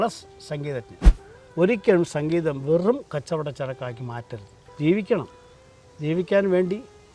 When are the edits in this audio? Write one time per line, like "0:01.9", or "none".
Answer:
0:01.0